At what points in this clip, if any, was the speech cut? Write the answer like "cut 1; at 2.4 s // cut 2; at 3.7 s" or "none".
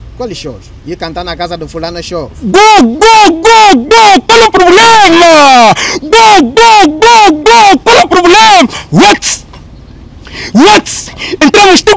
cut 1; at 2.3 s